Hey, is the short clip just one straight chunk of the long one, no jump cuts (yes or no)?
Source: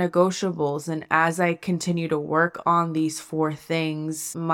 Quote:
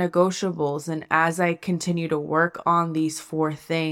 yes